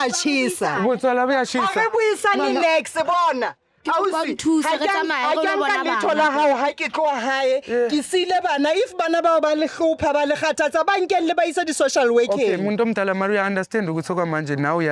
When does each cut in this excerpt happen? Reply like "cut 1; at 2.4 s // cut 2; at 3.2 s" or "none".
none